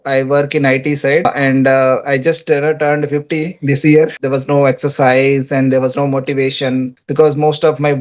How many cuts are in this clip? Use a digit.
3